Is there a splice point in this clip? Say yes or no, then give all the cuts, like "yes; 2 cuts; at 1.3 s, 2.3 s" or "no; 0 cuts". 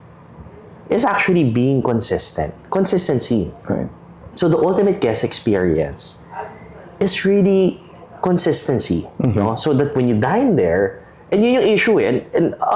no; 0 cuts